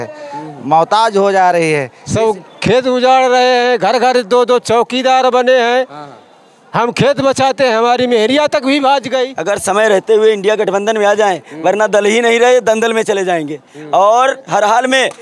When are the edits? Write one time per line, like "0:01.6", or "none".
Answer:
0:02.0
0:09.4